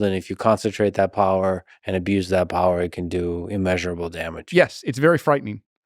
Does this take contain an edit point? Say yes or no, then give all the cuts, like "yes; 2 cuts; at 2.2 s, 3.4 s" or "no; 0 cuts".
no; 0 cuts